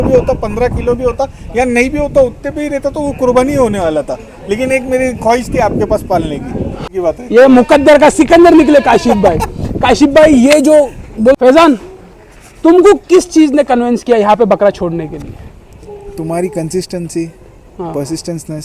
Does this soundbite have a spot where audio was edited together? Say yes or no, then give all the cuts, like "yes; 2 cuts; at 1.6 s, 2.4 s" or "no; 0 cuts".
yes; 2 cuts; at 6.8 s, 11.4 s